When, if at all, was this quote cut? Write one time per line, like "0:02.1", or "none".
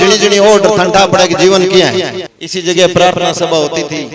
0:02.1